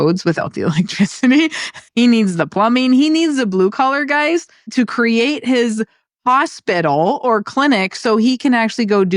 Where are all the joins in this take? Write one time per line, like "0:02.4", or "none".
0:01.8
0:04.6

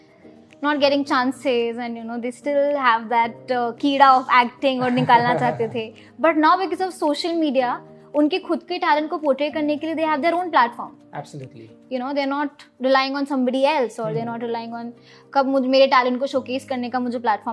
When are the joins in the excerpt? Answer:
none

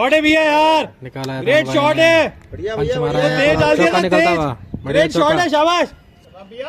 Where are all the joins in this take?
none

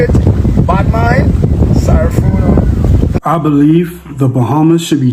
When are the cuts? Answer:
0:03.2

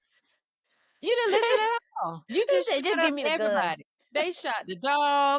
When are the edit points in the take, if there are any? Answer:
none

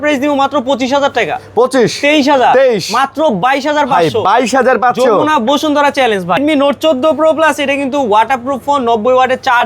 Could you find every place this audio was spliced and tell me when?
0:06.4

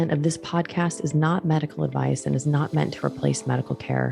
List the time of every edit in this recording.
none

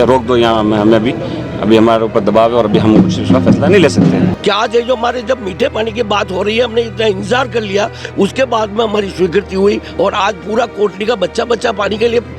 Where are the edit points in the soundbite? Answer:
0:04.3

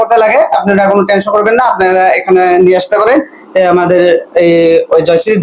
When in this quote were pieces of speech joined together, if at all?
none

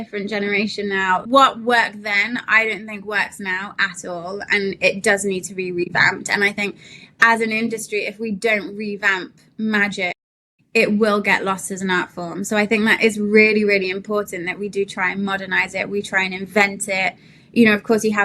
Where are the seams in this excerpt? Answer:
0:01.2

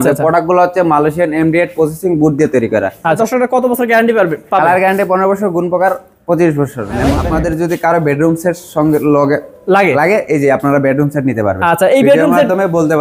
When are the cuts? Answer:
0:03.2
0:07.1

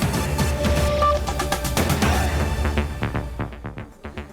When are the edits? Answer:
none

